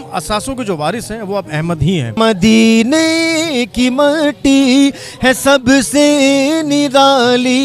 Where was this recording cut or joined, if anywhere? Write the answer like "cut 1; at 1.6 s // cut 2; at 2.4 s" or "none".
cut 1; at 2.2 s